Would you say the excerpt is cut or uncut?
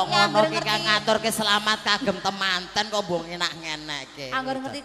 uncut